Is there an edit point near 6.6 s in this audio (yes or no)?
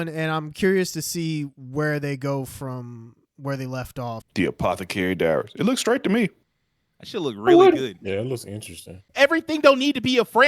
no